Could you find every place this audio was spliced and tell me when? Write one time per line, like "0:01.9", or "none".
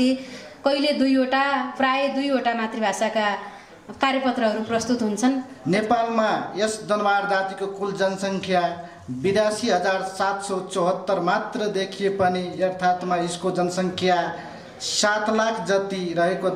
0:05.5